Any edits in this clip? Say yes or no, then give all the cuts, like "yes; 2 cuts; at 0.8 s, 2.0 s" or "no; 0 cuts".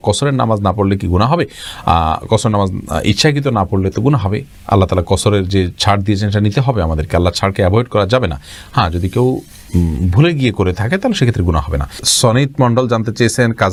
no; 0 cuts